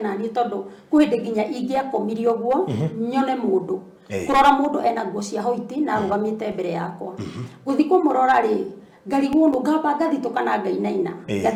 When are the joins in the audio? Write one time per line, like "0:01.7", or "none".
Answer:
none